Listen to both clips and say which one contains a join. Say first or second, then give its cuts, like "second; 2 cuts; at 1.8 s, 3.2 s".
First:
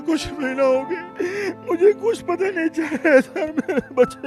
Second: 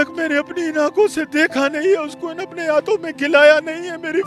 first; 1 cut; at 1.0 s